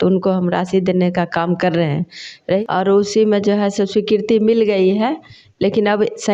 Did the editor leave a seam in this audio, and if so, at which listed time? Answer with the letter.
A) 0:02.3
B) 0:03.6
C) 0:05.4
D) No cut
A